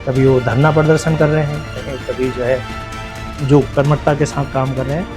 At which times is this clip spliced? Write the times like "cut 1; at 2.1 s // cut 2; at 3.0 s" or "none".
none